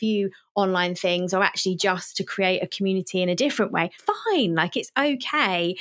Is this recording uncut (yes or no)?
no